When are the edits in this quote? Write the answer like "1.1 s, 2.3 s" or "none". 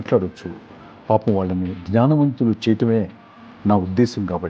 none